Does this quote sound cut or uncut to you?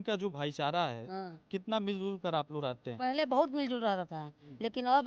uncut